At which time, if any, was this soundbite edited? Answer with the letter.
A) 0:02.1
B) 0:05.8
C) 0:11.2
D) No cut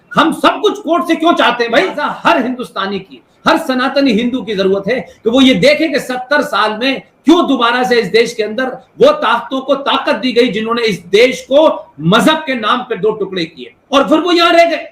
A